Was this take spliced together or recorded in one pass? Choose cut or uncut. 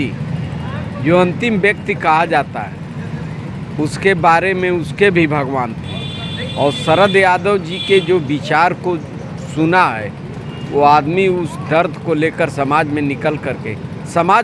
uncut